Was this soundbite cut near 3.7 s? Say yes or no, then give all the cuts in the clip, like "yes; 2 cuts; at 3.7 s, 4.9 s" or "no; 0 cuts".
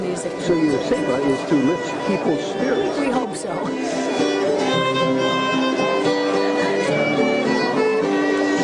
yes; 1 cut; at 3.7 s